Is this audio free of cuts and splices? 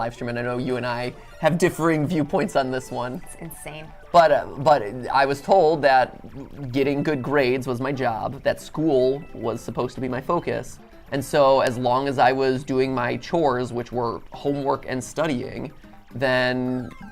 yes; 0 cuts

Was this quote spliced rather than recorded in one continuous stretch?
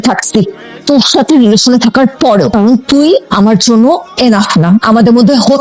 yes; 1 cut; at 2.5 s

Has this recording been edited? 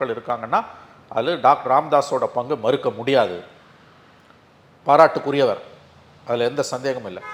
no; 0 cuts

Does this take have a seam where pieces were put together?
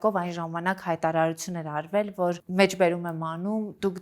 yes; 1 cut; at 2.4 s

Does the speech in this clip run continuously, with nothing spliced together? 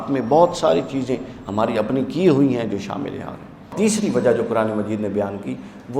no; 1 cut; at 3.8 s

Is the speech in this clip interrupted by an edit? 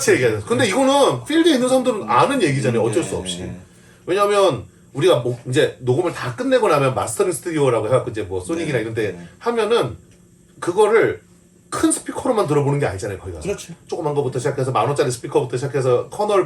no; 0 cuts

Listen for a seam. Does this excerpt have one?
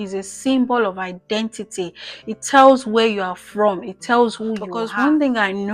yes; 1 cut; at 4.7 s

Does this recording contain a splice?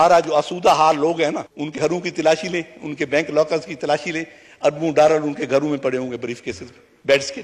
yes; 1 cut; at 1.8 s

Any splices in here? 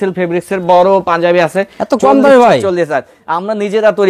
no; 0 cuts

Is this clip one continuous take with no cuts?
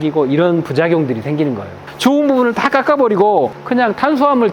no; 1 cut; at 2.0 s

